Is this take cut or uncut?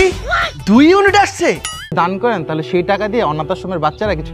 cut